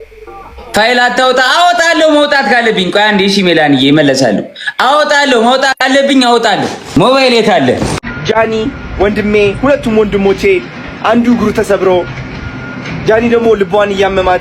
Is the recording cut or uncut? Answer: cut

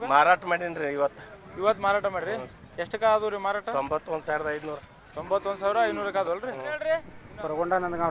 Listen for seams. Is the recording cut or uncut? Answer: cut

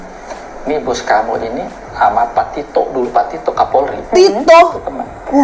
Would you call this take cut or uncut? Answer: uncut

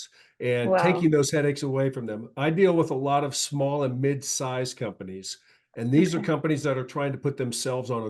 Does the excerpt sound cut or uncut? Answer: uncut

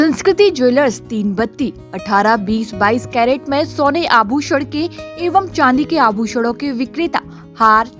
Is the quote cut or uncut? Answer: uncut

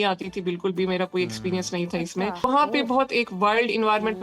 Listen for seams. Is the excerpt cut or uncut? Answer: cut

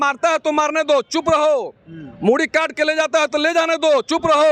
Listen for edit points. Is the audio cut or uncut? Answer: uncut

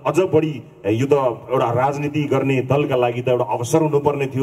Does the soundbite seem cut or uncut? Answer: uncut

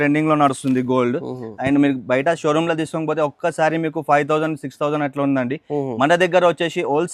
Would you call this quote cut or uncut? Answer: uncut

